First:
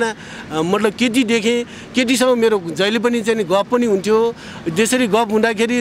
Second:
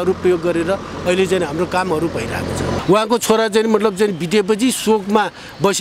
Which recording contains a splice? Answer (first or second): second